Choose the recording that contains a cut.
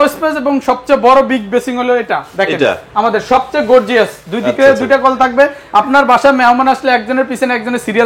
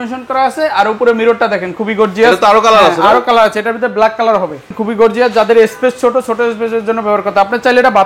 second; 1 cut; at 4.8 s

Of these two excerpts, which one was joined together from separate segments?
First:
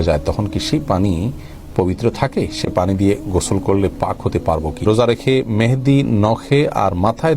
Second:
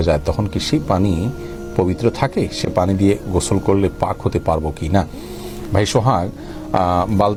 first; 1 cut; at 4.8 s

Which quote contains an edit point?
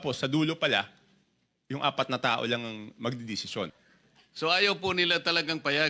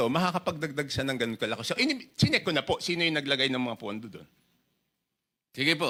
first; 1 cut; at 3.7 s

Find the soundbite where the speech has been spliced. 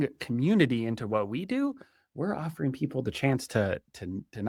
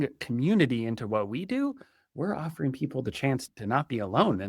second; 1 cut; at 3.5 s

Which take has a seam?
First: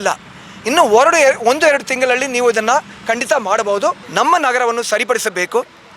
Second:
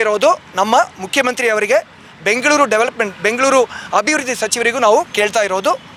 first; 1 cut; at 4.0 s

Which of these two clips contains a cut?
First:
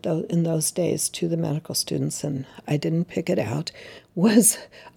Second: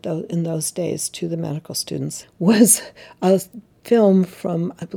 second; 1 cut; at 2.2 s

